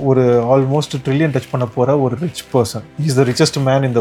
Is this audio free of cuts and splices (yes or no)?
yes